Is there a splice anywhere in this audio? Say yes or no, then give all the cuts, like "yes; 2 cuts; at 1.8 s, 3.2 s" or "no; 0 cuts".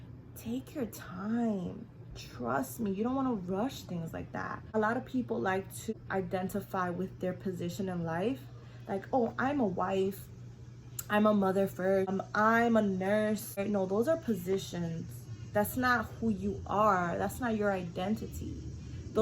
yes; 4 cuts; at 4.6 s, 5.9 s, 12.1 s, 13.6 s